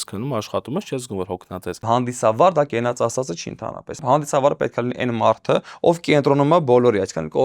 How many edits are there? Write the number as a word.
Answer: two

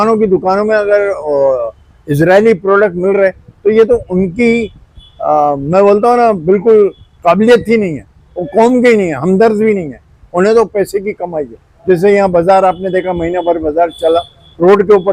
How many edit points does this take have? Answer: zero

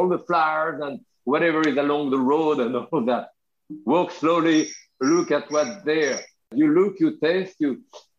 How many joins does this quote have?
one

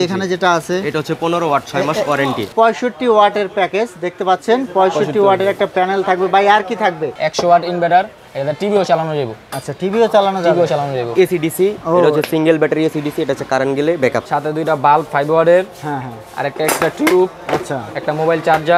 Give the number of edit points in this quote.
four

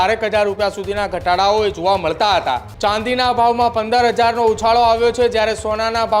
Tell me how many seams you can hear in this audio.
one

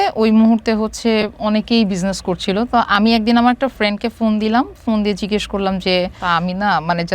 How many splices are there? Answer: one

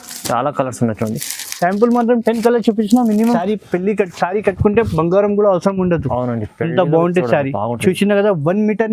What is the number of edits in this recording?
one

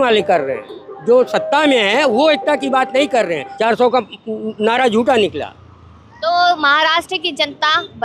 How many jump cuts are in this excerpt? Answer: one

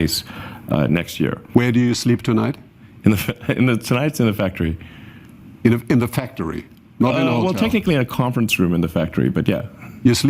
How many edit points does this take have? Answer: one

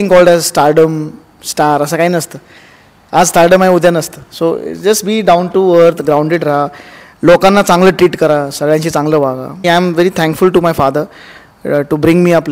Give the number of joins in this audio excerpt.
one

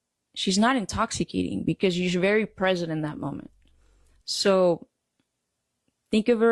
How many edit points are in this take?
zero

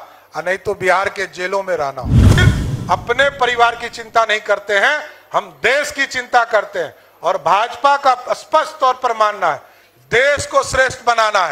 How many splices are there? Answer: one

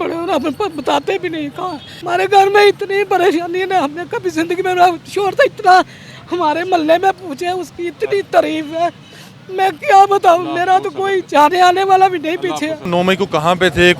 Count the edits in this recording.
two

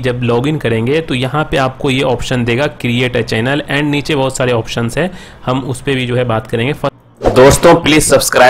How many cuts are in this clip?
one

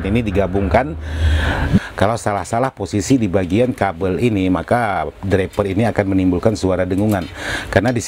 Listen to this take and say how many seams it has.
one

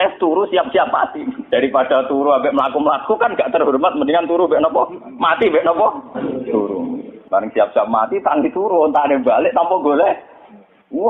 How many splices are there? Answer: two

